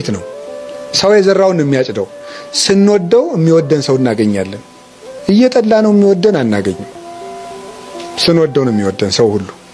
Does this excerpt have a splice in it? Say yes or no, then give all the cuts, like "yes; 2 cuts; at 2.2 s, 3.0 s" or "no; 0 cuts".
no; 0 cuts